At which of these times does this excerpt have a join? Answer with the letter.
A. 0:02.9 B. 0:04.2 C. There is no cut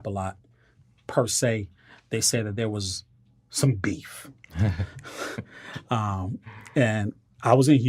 C